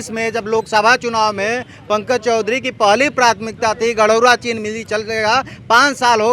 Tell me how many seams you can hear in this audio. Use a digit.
0